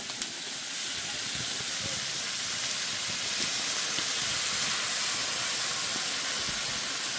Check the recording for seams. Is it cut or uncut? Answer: uncut